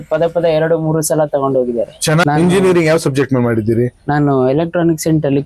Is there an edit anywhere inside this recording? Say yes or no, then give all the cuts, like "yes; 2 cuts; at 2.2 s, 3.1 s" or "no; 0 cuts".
yes; 1 cut; at 2.2 s